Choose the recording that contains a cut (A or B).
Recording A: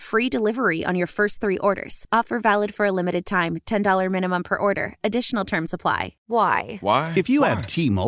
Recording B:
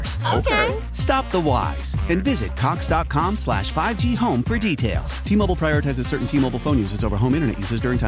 A